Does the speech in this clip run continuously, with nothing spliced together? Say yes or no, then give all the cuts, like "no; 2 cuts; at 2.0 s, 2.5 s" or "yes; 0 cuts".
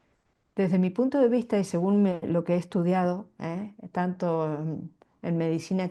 yes; 0 cuts